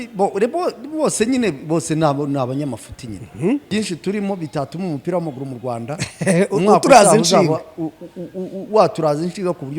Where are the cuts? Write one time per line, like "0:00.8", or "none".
0:03.7